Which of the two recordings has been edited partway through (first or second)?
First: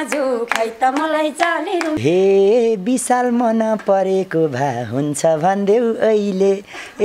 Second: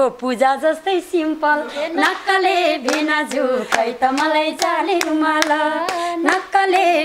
first